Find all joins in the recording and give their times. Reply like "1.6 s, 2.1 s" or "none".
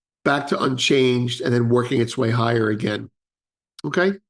none

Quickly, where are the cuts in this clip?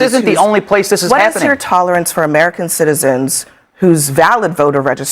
1.2 s

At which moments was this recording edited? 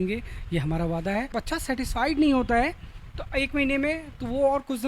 1.3 s

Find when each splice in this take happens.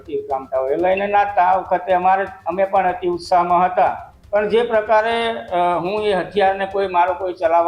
4.1 s

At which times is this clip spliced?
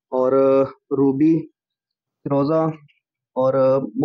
none

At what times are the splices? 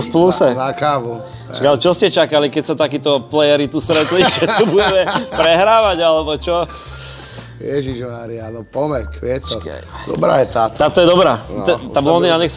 none

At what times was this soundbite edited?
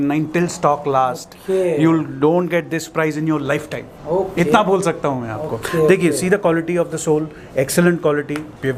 none

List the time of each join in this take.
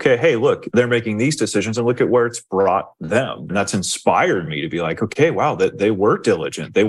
0.7 s, 3.5 s

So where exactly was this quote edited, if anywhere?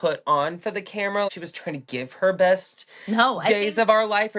1.3 s

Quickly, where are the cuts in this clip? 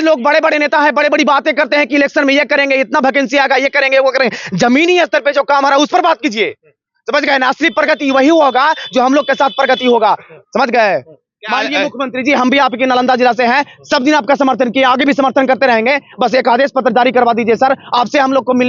none

